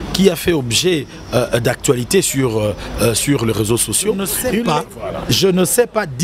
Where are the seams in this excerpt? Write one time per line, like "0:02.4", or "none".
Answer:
0:04.3